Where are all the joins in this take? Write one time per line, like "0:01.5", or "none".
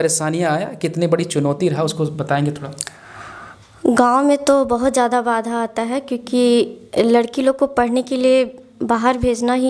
none